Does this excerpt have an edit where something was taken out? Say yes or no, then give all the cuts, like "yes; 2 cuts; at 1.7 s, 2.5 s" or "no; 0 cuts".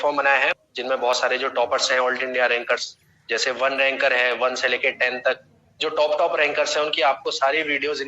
yes; 1 cut; at 1.1 s